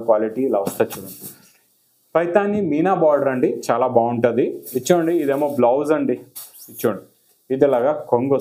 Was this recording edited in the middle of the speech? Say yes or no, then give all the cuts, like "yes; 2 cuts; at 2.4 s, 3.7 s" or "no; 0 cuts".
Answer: yes; 1 cut; at 4.6 s